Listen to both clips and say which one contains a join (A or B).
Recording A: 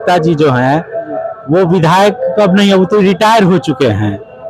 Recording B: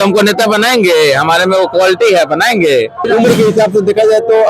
B